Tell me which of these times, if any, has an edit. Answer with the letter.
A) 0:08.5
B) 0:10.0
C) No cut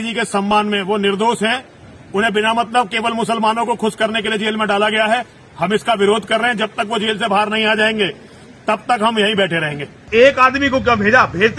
B